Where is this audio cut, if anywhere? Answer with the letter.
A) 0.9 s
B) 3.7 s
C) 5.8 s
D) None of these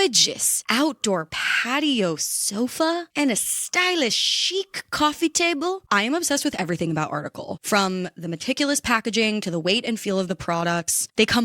C